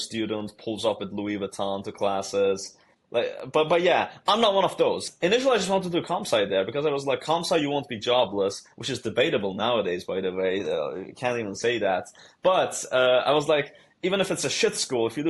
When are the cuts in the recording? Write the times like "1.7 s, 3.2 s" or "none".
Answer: 5.1 s